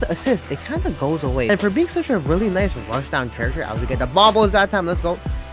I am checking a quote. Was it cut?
yes; 1 cut; at 1.5 s

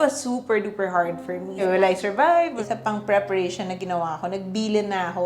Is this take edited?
yes; 2 cuts; at 1.6 s, 2.5 s

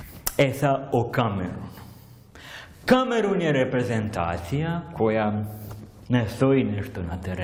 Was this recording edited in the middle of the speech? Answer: no; 0 cuts

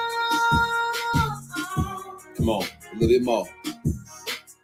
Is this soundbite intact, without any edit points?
yes; 0 cuts

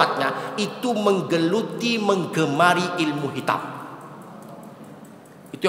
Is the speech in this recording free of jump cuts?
yes; 0 cuts

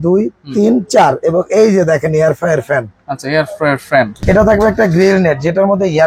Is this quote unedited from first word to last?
no; 1 cut; at 4.2 s

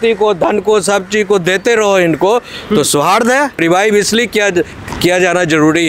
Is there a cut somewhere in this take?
yes; 1 cut; at 3.6 s

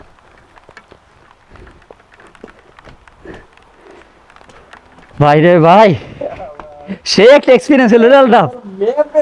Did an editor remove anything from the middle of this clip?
no; 0 cuts

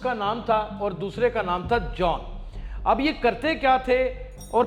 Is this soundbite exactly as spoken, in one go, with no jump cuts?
yes; 0 cuts

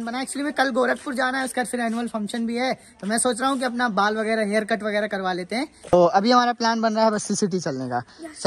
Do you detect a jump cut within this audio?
no; 0 cuts

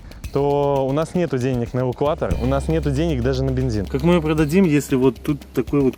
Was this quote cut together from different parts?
yes; 1 cut; at 3.8 s

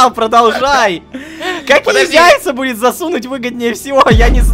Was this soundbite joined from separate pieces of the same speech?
no; 0 cuts

